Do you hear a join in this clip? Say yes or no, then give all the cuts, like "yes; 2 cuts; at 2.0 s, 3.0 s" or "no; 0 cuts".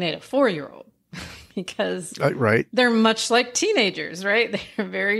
no; 0 cuts